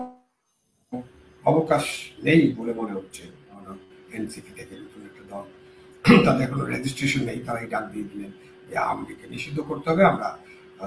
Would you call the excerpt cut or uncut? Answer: cut